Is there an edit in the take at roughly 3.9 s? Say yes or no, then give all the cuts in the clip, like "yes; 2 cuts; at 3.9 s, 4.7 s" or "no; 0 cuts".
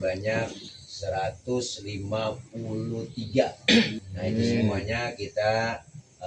yes; 1 cut; at 3.9 s